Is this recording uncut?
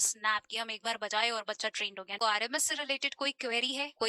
no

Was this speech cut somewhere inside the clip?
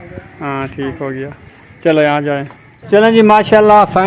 no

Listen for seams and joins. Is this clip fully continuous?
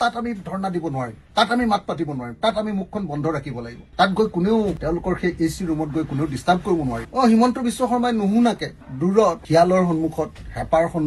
yes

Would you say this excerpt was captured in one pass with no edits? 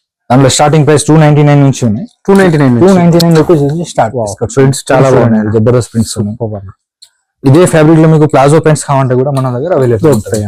yes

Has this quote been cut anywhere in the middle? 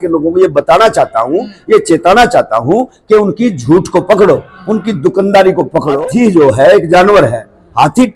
yes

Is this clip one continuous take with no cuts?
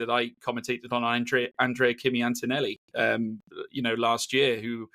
yes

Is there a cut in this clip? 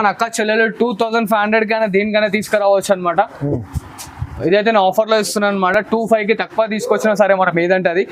no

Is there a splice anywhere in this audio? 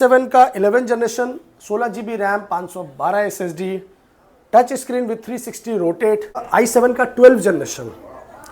yes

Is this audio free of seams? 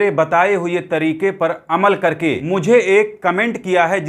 no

